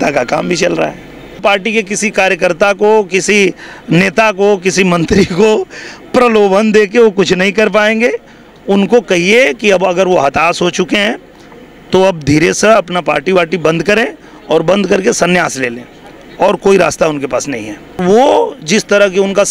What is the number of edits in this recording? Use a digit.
2